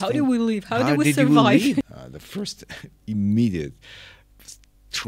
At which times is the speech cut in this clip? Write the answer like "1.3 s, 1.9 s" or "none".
1.8 s